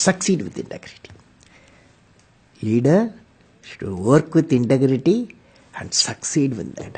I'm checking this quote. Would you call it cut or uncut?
uncut